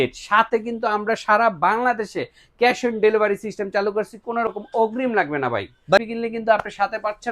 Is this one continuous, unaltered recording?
no; 1 cut; at 6.0 s

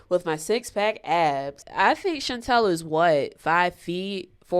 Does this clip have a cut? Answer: yes; 1 cut; at 1.6 s

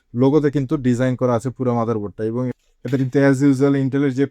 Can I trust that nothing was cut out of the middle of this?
no; 1 cut; at 2.5 s

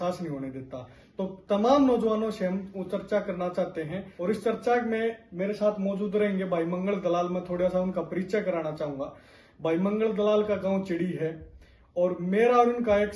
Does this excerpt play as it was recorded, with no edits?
yes; 0 cuts

